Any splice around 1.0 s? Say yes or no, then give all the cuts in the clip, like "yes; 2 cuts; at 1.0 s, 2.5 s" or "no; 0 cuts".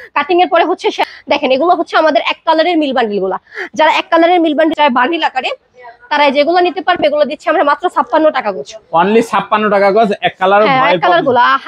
yes; 2 cuts; at 1.0 s, 4.7 s